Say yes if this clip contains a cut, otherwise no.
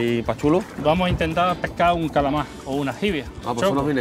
yes